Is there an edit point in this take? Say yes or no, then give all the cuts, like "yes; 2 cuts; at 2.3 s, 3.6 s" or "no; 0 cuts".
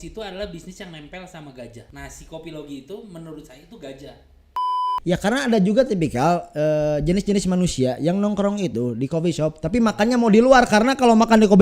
yes; 2 cuts; at 1.9 s, 4.8 s